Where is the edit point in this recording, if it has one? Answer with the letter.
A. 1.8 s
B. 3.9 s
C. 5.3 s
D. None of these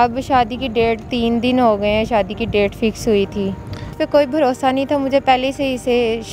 B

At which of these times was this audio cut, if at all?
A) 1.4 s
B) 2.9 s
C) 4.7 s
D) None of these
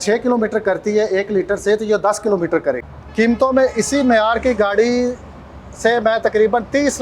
B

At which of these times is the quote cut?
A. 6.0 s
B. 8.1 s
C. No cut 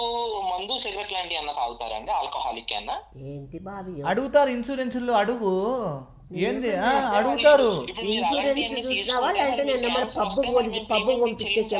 C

